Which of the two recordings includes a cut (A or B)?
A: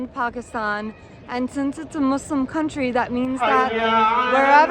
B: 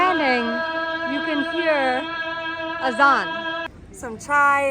B